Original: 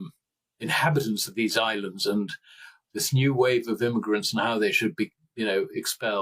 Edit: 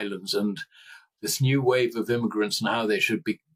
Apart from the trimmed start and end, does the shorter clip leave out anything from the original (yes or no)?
no